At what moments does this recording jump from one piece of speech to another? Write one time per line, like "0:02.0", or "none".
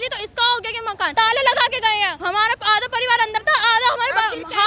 0:01.1
0:02.2